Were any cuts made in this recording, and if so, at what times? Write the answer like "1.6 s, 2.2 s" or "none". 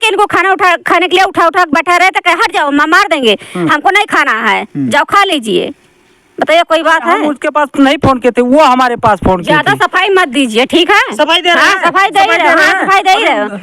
7.3 s